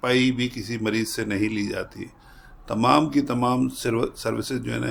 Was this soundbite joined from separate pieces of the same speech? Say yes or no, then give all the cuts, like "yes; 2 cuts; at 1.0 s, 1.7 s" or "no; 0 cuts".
no; 0 cuts